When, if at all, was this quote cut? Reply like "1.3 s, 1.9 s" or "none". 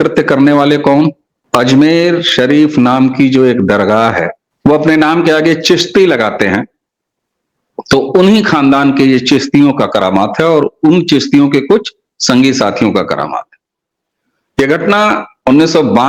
1.3 s, 4.4 s